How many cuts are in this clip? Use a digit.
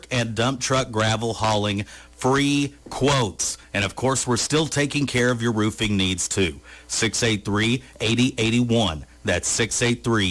0